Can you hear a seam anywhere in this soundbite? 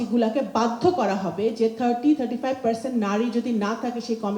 no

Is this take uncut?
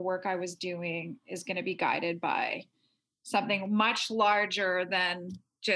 yes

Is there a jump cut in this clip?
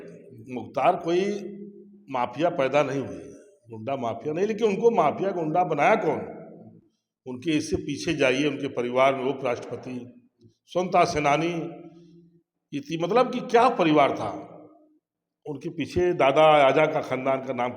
no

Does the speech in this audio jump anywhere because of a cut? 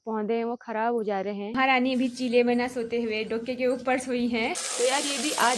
yes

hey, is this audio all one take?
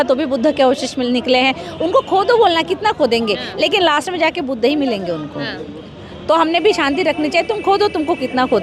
yes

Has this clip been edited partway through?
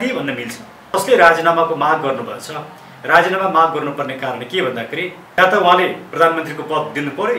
yes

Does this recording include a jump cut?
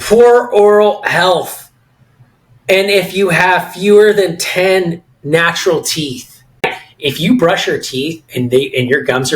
yes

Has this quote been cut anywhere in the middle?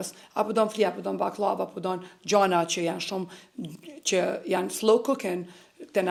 no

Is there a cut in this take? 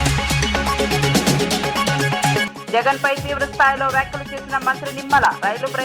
yes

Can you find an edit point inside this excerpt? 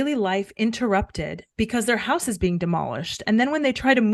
no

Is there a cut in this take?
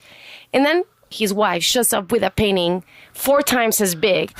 yes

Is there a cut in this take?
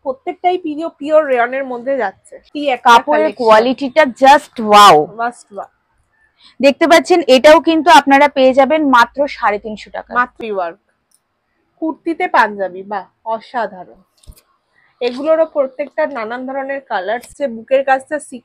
yes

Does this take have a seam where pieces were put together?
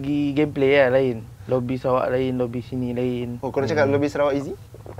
yes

